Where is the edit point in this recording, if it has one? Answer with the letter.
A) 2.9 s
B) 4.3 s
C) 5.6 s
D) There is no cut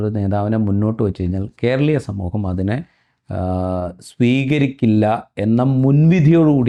D